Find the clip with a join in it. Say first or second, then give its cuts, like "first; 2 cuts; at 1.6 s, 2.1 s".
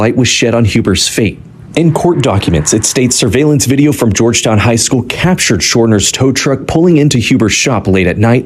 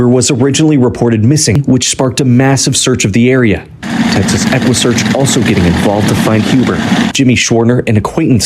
second; 2 cuts; at 1.6 s, 7.1 s